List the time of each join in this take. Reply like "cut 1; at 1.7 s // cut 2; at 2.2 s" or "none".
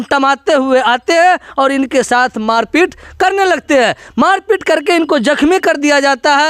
none